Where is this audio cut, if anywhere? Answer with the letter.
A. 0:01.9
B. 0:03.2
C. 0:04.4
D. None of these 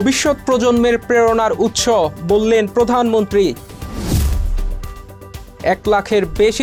D